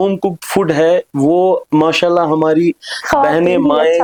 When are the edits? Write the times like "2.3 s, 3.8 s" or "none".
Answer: none